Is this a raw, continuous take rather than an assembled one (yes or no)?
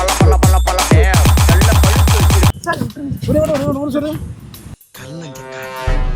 no